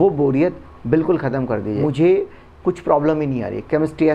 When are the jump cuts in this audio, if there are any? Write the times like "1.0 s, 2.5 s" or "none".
1.8 s